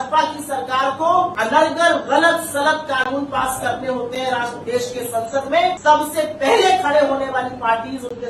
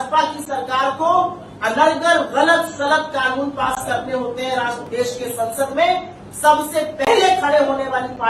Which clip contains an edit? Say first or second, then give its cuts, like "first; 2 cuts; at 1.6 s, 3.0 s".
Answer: first; 2 cuts; at 1.3 s, 5.8 s